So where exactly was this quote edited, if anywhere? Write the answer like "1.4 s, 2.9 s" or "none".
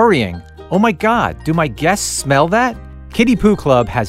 none